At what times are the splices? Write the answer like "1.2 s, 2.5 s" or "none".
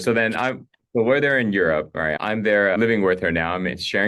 2.8 s